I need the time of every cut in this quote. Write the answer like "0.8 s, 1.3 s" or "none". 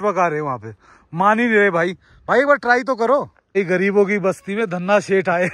3.4 s

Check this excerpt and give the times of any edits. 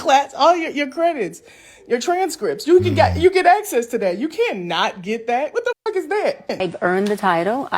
6.5 s

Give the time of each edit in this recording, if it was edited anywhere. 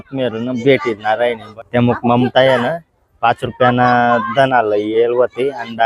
1.5 s

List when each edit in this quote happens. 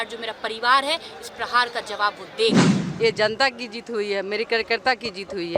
2.8 s

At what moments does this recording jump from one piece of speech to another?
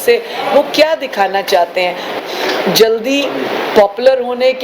2.2 s

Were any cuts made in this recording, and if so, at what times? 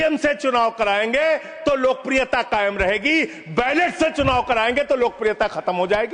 none

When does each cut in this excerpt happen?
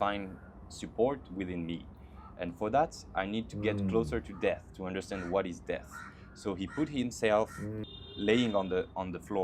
7.5 s

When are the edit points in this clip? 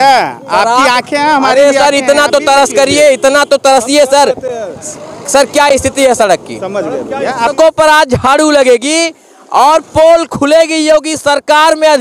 7.5 s

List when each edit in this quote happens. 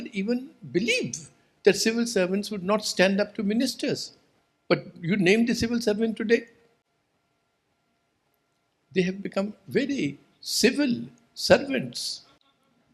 none

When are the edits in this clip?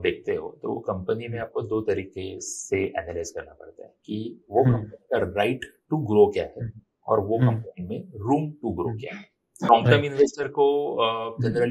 9.7 s

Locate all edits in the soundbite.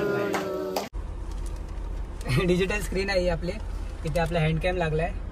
1.0 s

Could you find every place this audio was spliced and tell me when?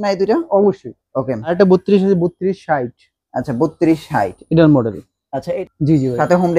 1.5 s, 5.5 s

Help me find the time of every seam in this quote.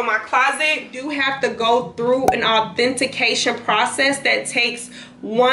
1.0 s

